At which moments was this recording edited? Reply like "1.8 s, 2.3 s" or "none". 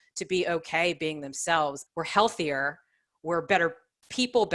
1.9 s